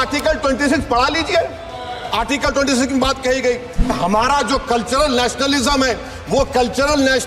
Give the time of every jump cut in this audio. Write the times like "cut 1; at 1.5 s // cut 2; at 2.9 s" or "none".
cut 1; at 3.9 s